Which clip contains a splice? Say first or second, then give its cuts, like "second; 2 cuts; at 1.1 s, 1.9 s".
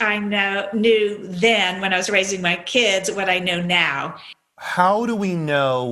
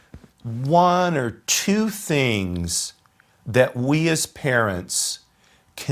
first; 1 cut; at 4.3 s